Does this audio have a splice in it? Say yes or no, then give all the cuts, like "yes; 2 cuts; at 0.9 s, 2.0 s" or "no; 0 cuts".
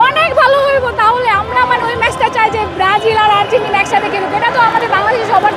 no; 0 cuts